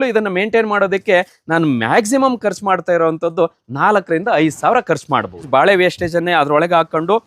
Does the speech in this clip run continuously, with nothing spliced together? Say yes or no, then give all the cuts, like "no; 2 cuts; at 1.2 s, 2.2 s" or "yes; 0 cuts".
no; 1 cut; at 5.4 s